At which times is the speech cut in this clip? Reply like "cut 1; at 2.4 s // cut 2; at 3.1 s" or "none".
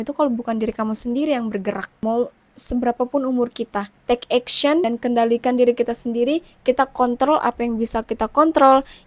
cut 1; at 1.9 s // cut 2; at 3.9 s // cut 3; at 4.8 s